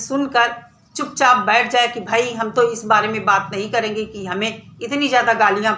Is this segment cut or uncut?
uncut